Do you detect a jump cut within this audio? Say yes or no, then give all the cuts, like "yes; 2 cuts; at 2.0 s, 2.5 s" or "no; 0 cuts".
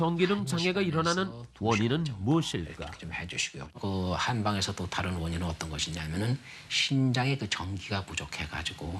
no; 0 cuts